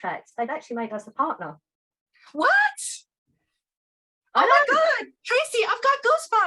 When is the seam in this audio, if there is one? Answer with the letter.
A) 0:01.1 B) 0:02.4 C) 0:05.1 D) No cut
D